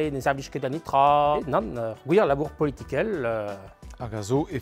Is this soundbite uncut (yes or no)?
no